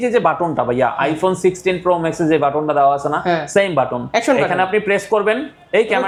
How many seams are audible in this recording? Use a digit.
0